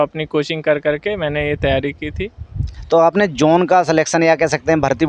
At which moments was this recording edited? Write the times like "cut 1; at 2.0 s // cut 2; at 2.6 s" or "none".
cut 1; at 2.7 s